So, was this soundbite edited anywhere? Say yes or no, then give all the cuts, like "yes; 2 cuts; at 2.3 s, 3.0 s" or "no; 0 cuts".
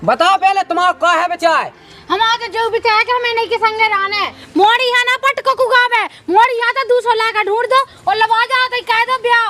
yes; 1 cut; at 4.4 s